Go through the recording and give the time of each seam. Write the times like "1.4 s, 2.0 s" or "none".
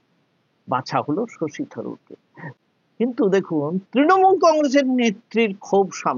2.6 s